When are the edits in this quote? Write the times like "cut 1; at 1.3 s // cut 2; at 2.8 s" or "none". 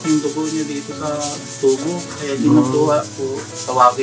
none